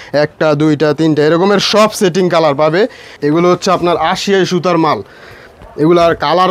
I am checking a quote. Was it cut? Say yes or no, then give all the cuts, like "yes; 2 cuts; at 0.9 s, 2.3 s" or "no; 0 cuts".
yes; 1 cut; at 3.2 s